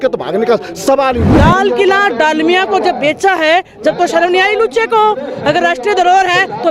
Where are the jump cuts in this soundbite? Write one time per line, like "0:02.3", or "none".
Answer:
0:01.3